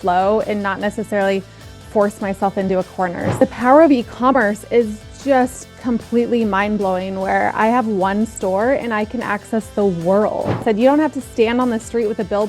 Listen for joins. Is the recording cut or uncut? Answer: cut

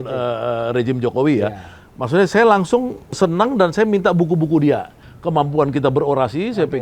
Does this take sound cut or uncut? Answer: cut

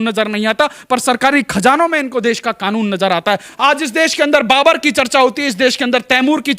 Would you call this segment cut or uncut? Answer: cut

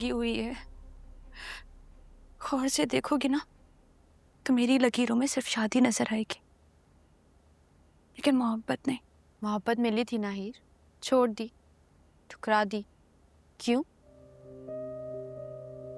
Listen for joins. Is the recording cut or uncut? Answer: uncut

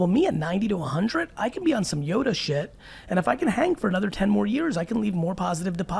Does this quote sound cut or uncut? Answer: uncut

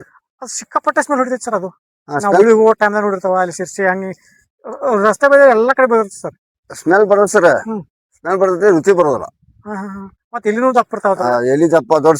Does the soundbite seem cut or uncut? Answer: uncut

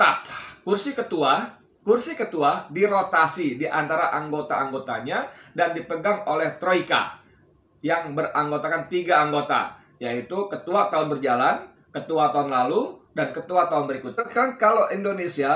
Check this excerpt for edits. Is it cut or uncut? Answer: uncut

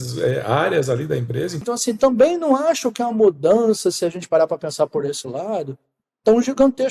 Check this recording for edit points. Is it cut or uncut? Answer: cut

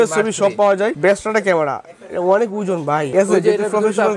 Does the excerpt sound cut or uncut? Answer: uncut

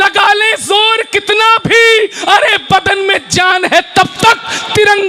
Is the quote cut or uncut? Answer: uncut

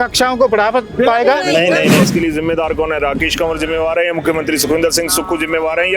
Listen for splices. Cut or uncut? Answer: cut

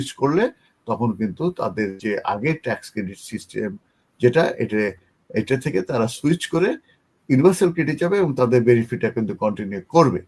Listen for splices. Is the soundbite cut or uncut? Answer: uncut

